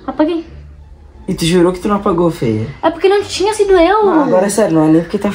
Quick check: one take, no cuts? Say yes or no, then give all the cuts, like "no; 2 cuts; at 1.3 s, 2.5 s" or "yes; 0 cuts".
yes; 0 cuts